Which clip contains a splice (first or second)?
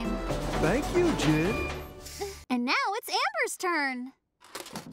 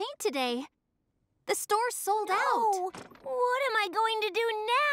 first